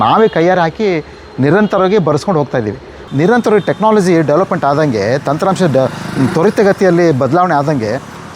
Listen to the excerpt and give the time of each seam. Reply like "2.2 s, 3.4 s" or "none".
3.0 s